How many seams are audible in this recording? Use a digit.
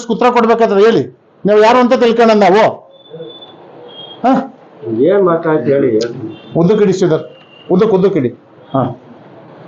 0